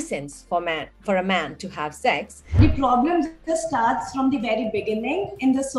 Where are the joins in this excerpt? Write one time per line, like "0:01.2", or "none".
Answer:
0:02.6